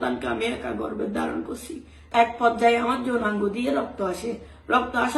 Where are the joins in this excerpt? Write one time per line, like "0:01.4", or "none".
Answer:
0:02.0